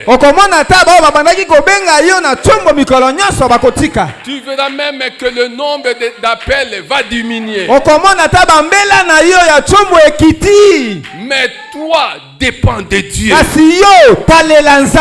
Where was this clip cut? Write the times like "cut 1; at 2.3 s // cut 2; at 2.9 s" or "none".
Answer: none